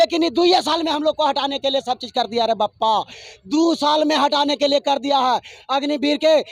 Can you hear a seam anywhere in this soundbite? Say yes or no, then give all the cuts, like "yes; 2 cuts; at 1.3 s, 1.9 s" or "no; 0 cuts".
no; 0 cuts